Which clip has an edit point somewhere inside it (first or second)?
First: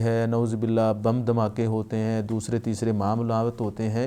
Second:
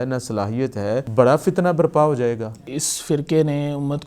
second